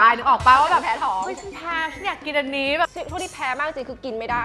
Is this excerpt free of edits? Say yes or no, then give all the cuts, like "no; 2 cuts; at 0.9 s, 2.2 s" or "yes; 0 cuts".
no; 1 cut; at 2.9 s